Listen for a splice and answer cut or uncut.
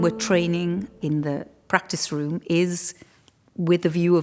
cut